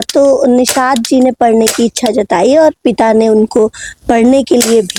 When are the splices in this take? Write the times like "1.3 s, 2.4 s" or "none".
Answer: none